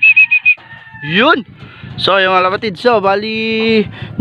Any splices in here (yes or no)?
no